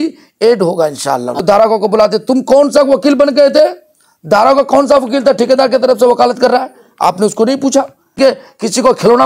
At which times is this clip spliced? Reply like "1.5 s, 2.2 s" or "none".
1.3 s, 8.2 s

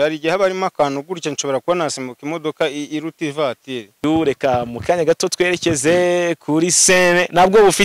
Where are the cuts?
4.0 s

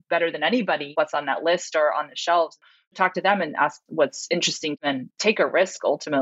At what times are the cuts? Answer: 0.9 s, 2.8 s, 4.8 s

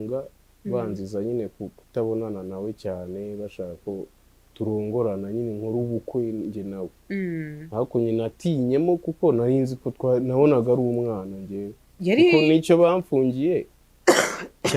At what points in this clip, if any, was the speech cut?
none

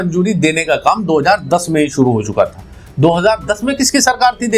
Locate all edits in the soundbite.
none

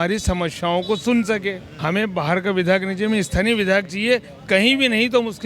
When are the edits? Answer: 1.7 s

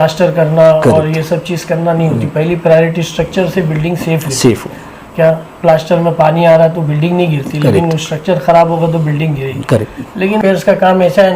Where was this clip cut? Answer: 10.4 s

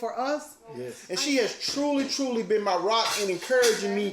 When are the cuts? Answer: 1.0 s

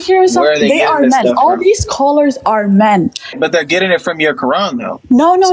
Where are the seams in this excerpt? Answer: 3.3 s

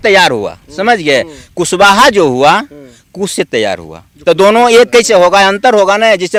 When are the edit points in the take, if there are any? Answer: none

